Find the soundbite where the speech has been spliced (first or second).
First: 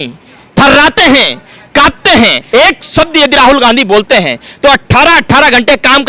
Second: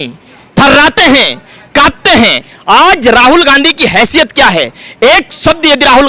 first